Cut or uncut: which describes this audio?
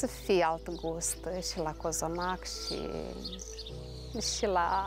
uncut